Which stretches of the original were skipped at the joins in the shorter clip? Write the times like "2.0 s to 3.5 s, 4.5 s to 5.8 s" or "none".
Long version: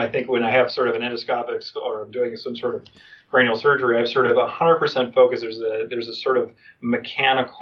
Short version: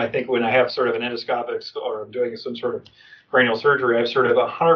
none